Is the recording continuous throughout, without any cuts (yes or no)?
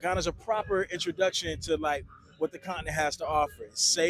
yes